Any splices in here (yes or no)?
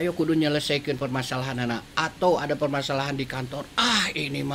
no